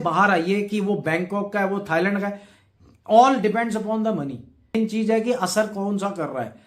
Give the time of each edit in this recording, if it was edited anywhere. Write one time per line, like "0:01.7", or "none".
0:04.7